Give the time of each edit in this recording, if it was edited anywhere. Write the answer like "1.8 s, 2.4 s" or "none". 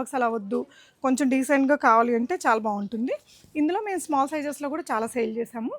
none